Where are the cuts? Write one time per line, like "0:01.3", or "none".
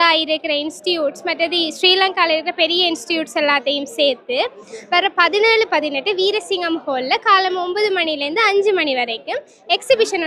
none